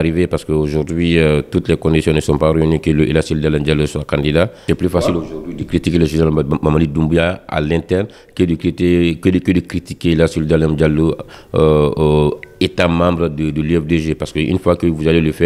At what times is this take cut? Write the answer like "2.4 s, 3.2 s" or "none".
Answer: 4.7 s